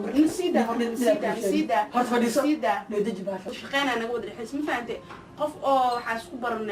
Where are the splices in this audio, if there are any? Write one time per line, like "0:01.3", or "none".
0:03.5

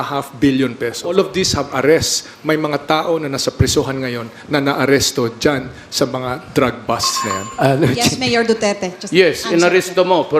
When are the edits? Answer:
0:01.1

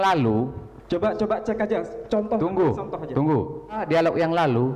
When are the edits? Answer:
0:03.8

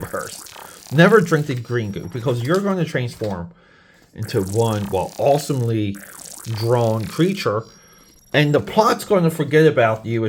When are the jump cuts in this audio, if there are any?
none

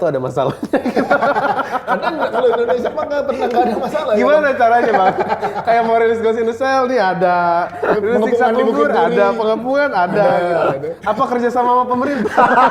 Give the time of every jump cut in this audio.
none

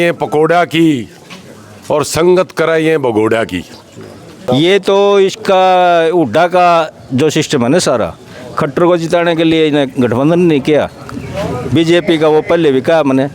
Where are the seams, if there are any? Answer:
0:04.4

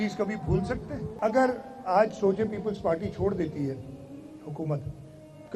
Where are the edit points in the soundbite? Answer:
0:01.1

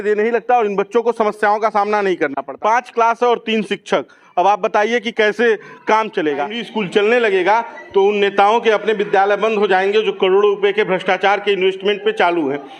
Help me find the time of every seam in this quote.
0:02.4
0:06.6

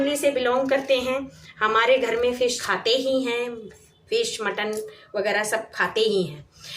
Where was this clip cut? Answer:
0:02.6

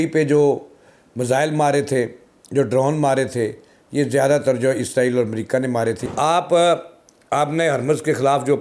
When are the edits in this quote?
0:06.0

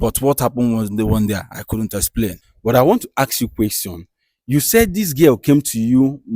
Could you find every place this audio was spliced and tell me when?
0:02.5

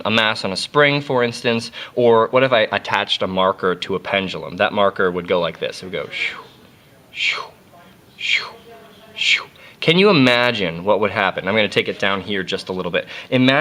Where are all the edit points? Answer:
none

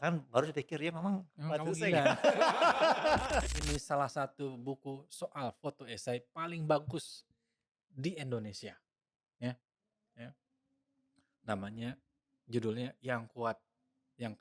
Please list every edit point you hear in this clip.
0:03.5

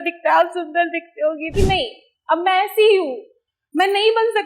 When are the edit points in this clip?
0:01.5

